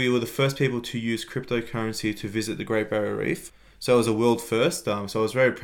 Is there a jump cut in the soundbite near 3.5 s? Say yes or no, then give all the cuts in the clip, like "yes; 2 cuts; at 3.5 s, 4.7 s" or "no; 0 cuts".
yes; 1 cut; at 3.5 s